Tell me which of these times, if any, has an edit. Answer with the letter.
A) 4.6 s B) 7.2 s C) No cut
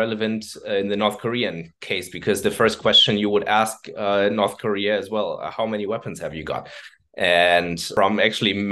C